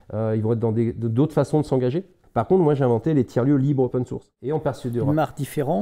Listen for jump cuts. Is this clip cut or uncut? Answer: cut